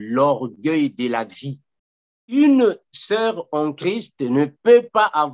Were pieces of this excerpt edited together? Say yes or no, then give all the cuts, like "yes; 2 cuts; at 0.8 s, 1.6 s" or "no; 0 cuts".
yes; 1 cut; at 2.4 s